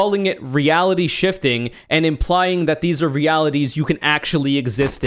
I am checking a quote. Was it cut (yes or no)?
no